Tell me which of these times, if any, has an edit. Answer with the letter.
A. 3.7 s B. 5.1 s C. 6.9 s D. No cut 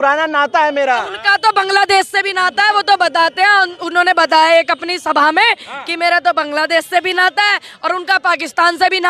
D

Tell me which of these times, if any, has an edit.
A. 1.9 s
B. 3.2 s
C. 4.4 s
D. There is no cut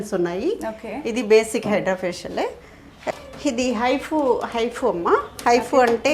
B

